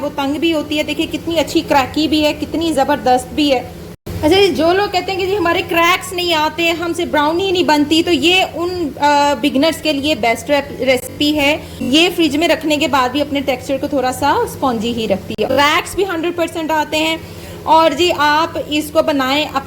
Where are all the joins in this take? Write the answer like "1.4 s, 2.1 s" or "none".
3.9 s, 11.4 s, 15.4 s